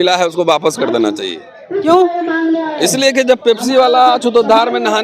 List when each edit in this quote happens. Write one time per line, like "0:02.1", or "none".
none